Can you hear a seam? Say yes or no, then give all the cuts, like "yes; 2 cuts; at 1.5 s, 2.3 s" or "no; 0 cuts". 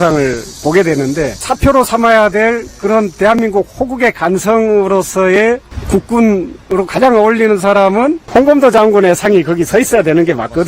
yes; 3 cuts; at 1.5 s, 5.7 s, 8.2 s